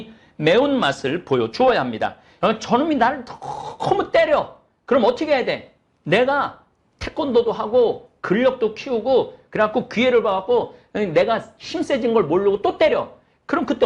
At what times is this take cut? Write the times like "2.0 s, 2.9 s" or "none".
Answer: 2.2 s